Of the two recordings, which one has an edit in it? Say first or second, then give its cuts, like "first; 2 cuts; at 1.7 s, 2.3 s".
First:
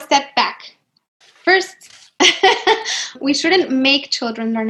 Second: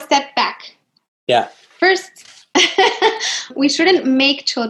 first; 1 cut; at 1.2 s